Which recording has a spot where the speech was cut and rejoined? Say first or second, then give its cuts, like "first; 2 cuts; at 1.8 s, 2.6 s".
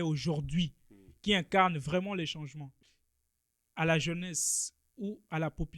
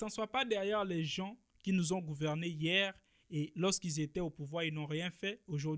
first; 1 cut; at 2.7 s